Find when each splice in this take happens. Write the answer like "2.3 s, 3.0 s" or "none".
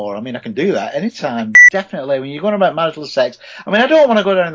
1.5 s